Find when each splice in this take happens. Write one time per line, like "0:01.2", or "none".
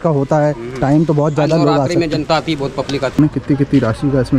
0:03.2